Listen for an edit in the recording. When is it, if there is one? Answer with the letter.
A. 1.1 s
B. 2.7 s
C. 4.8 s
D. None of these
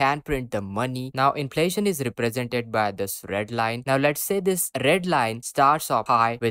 A